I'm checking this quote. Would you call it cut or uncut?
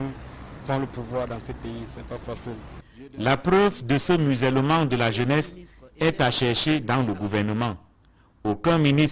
uncut